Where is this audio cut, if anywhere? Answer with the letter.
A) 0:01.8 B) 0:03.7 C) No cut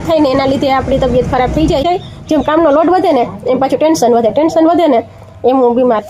A